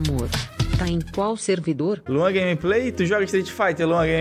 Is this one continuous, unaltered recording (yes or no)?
no